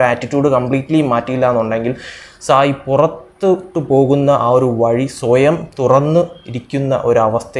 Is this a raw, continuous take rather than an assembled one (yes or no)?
yes